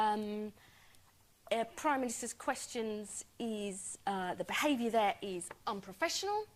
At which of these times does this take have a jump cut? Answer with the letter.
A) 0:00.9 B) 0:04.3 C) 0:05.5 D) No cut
D